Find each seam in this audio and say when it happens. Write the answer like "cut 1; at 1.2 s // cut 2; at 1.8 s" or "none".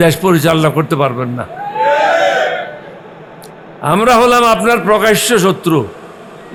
none